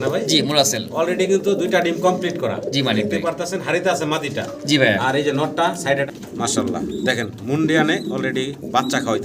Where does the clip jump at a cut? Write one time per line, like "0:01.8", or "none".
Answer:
0:06.1